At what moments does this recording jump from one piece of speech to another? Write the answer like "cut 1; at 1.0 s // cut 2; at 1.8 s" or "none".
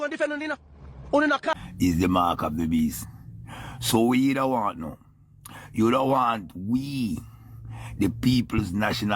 cut 1; at 1.5 s